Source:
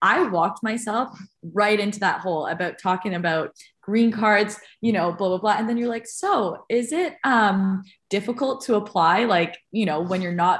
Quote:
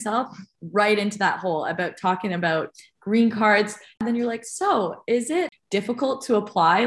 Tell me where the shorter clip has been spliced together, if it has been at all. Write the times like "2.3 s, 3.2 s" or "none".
4.0 s, 5.5 s